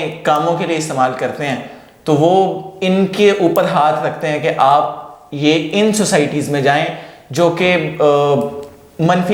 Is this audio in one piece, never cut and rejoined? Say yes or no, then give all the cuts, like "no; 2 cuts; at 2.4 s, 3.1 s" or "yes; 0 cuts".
yes; 0 cuts